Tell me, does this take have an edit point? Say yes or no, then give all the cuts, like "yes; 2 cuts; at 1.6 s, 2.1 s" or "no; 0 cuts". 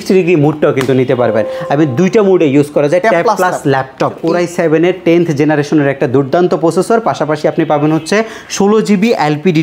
yes; 1 cut; at 4.2 s